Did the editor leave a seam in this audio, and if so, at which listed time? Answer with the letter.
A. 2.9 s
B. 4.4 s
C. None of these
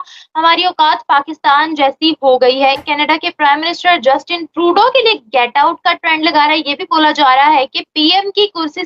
A